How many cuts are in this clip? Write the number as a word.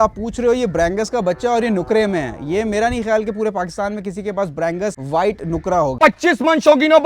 two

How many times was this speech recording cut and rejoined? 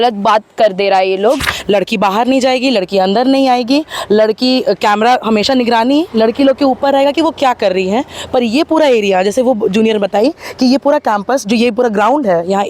one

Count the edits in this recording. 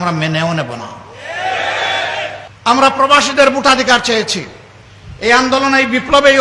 one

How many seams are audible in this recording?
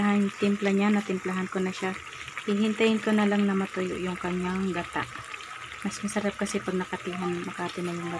zero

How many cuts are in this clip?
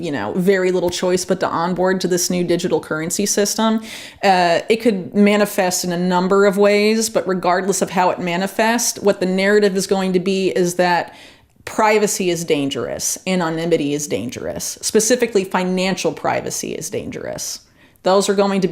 zero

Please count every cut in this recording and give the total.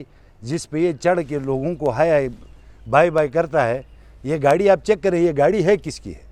zero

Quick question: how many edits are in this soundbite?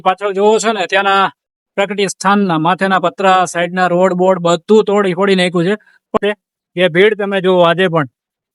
one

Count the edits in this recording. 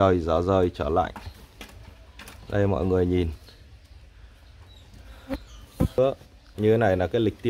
one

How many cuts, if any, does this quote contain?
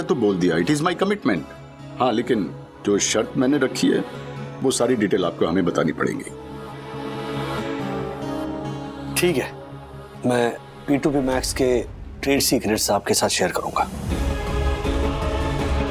zero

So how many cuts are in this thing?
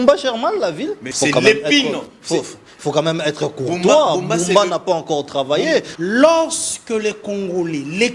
two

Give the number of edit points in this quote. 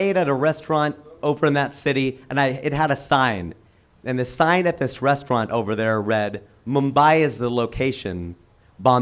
zero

